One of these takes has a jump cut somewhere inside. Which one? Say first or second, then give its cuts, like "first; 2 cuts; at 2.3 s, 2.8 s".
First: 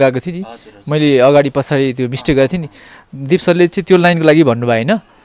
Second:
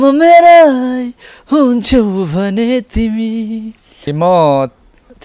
second; 1 cut; at 4.1 s